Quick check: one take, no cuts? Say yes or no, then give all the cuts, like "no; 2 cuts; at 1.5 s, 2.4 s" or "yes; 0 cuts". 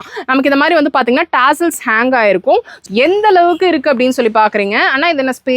no; 1 cut; at 2.7 s